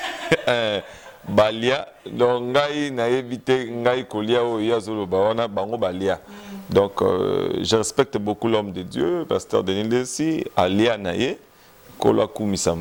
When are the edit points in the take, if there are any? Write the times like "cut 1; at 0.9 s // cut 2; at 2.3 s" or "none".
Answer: none